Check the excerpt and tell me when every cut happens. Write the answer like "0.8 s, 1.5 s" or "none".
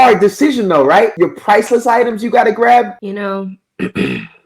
1.1 s, 3.0 s